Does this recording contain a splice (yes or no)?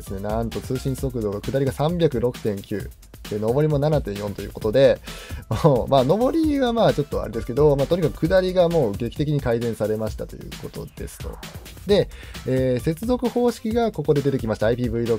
no